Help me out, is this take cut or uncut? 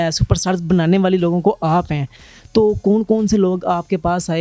uncut